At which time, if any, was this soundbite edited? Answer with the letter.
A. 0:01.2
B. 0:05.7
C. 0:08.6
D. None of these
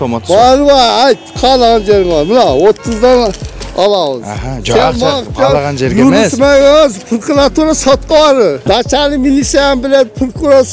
C